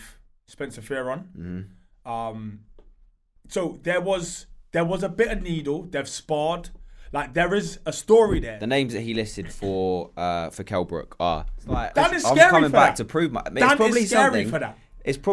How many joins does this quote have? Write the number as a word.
two